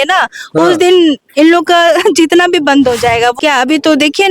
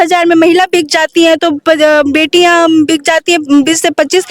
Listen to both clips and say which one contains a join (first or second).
first